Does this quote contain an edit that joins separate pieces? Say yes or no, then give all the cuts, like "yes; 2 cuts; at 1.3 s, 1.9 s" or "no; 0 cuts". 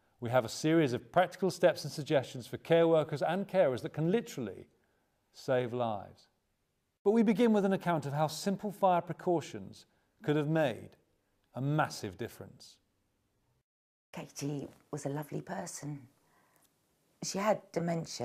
no; 0 cuts